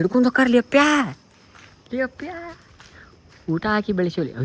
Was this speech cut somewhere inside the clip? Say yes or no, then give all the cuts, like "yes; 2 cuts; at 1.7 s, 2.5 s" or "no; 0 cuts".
no; 0 cuts